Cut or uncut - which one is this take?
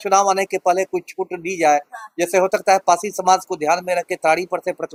uncut